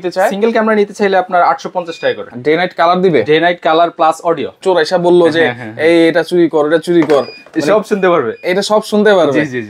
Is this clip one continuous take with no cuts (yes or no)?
no